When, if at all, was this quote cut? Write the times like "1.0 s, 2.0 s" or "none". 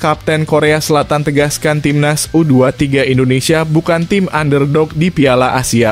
none